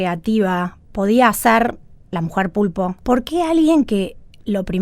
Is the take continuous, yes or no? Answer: no